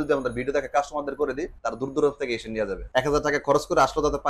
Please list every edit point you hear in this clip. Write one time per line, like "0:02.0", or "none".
0:01.6
0:02.8